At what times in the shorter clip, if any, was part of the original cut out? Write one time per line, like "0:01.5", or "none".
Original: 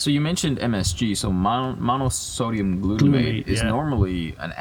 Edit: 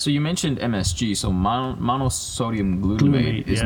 none